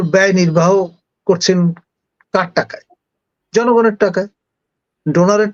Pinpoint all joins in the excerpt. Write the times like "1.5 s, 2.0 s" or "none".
none